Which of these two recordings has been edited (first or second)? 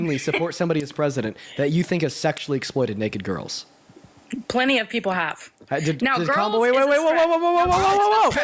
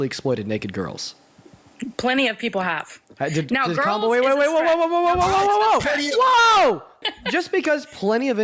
second